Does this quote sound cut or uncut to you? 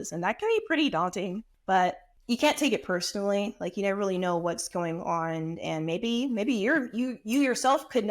cut